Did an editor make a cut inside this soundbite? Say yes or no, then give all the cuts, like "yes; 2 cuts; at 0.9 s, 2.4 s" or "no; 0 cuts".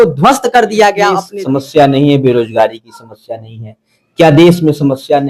yes; 1 cut; at 1.2 s